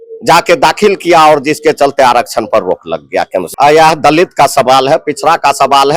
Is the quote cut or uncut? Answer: cut